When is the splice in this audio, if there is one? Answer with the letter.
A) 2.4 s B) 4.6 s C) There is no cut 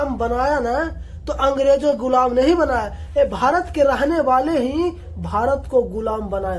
C